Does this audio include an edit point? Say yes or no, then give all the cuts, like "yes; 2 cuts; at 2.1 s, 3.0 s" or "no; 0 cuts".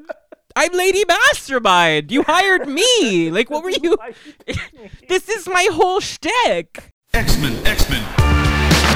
yes; 1 cut; at 6.9 s